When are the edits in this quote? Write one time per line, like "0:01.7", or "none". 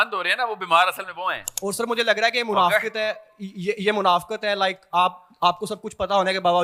none